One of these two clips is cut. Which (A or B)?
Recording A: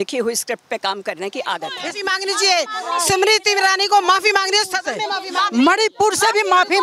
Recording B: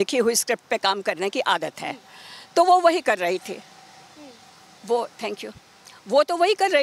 A